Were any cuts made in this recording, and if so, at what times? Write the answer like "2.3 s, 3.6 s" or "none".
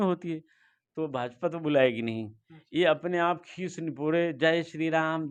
none